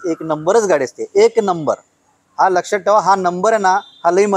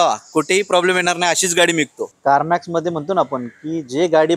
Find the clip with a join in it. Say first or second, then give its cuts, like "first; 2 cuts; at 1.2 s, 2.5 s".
second; 1 cut; at 2.0 s